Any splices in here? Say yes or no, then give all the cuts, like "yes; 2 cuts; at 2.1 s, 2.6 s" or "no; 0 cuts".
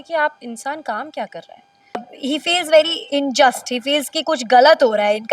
yes; 1 cut; at 2.1 s